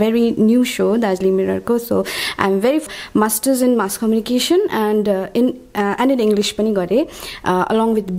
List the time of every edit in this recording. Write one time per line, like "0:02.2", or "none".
0:02.8